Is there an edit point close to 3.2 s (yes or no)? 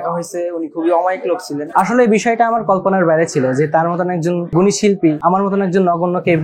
no